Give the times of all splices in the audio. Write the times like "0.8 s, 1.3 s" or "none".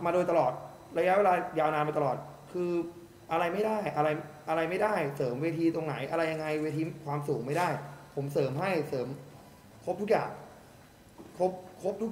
none

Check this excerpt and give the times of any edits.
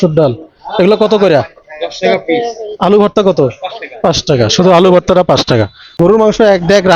5.8 s

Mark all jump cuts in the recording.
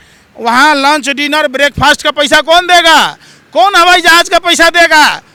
none

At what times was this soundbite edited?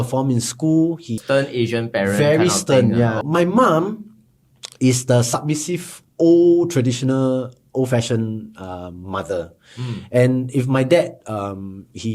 1.2 s, 3.2 s

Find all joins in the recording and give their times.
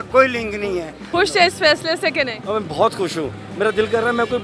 1.0 s

